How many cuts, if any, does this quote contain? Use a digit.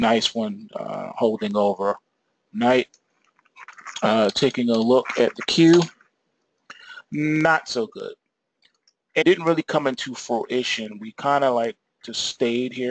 0